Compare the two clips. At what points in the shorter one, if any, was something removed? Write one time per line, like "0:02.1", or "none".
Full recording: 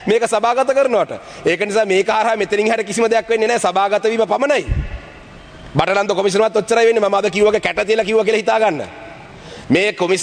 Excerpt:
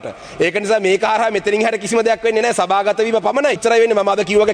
0:03.6